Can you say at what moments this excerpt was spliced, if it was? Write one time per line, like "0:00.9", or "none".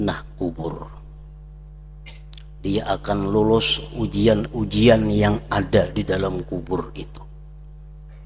none

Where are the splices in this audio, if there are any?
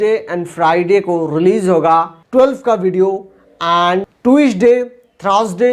0:02.2
0:04.1

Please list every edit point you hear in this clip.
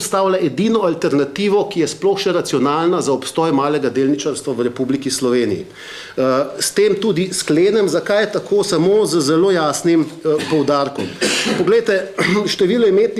none

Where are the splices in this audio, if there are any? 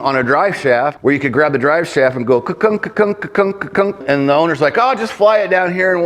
0:00.9
0:04.0

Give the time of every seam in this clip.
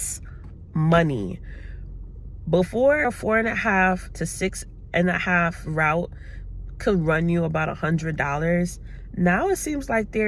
0:03.0

